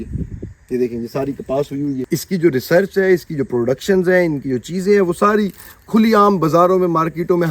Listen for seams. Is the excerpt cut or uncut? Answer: cut